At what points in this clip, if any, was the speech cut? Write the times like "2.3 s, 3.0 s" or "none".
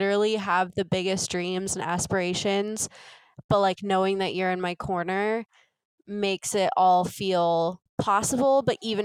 7.8 s